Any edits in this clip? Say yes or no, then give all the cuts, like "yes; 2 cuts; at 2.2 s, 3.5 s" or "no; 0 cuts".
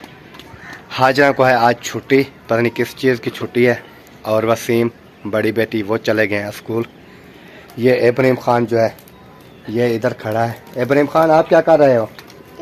no; 0 cuts